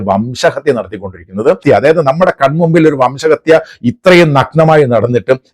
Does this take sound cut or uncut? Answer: cut